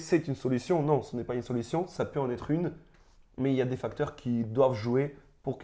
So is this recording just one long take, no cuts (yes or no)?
yes